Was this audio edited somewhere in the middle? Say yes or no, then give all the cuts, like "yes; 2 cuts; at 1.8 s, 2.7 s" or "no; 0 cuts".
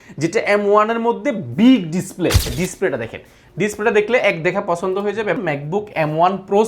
yes; 2 cuts; at 2.5 s, 5.4 s